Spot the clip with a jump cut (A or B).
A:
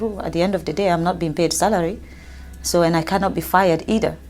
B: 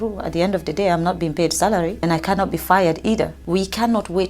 B